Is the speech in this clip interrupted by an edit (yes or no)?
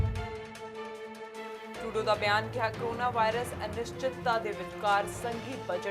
yes